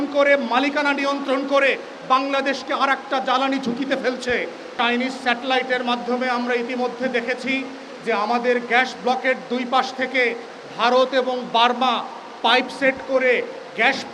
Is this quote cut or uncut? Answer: cut